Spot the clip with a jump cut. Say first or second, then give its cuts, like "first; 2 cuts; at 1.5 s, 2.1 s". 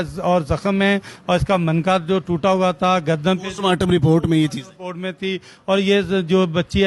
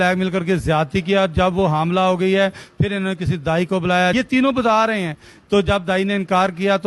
second; 1 cut; at 4.1 s